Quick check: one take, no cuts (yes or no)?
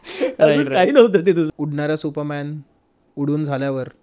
no